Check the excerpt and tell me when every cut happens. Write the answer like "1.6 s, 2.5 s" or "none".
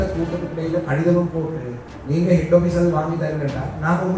none